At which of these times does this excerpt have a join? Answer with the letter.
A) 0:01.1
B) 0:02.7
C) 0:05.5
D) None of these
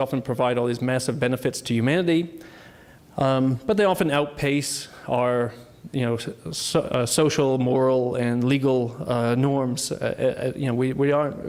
D